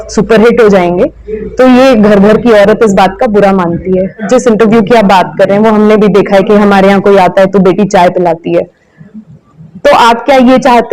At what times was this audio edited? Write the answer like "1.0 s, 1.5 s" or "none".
4.3 s